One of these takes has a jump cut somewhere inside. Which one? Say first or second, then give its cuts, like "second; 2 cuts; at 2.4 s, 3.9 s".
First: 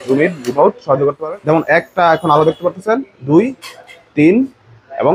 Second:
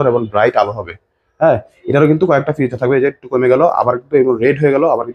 first; 1 cut; at 1.2 s